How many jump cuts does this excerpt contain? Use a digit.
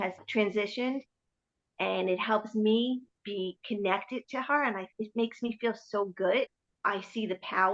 1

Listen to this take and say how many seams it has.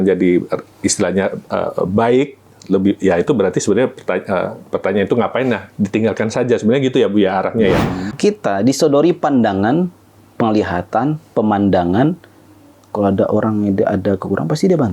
1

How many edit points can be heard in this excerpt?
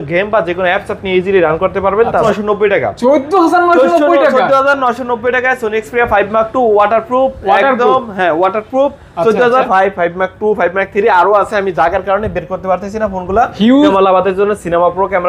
3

